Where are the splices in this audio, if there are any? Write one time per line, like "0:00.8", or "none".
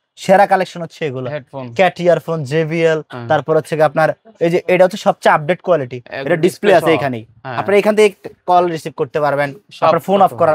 none